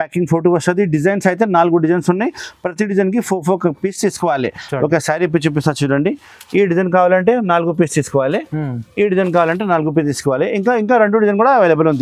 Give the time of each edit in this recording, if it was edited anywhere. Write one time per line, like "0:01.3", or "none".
none